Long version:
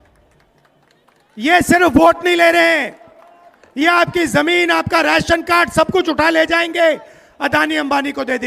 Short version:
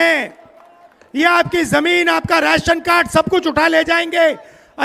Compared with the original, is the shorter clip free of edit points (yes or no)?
yes